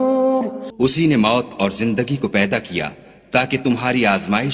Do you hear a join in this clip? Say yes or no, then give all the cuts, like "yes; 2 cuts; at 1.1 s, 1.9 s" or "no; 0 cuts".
no; 0 cuts